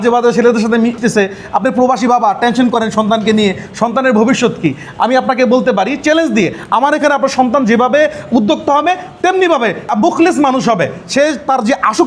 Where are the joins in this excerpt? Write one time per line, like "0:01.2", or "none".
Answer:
0:00.9
0:09.9